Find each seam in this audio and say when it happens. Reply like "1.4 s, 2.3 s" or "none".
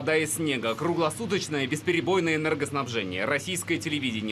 2.9 s